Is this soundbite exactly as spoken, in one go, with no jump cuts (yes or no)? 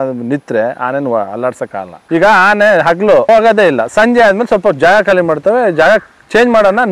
no